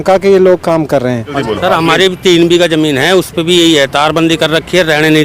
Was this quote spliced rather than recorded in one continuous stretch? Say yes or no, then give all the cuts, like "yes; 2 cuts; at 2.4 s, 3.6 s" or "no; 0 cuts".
yes; 1 cut; at 1.3 s